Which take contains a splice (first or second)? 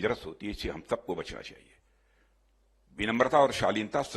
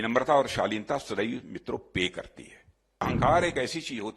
second